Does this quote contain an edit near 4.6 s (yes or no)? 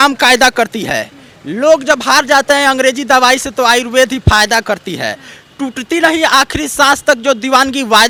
no